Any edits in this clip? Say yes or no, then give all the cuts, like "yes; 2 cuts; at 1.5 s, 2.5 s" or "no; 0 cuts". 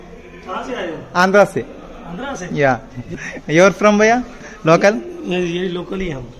yes; 1 cut; at 3.1 s